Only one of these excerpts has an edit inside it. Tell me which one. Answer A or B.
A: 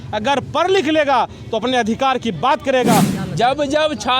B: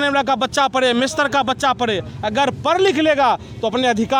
A